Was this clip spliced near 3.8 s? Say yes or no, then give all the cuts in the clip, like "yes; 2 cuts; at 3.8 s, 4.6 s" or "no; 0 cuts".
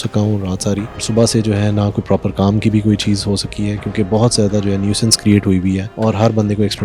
no; 2 cuts; at 1.0 s, 5.9 s